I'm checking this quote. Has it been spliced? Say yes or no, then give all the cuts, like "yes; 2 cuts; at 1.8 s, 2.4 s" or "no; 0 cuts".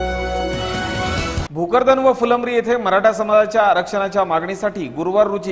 yes; 1 cut; at 1.5 s